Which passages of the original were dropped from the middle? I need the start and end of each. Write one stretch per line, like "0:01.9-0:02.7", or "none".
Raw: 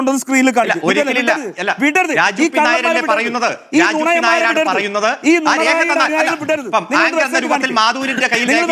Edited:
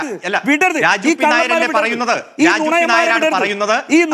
none